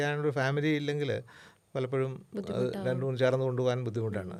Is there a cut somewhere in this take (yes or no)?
no